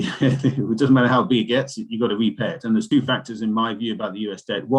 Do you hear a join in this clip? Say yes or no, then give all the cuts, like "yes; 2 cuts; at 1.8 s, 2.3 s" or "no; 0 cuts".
yes; 1 cut; at 2.9 s